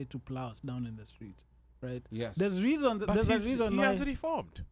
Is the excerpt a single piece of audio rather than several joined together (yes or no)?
yes